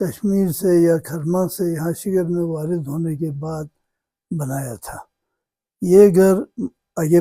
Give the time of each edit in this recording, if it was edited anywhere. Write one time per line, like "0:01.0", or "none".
none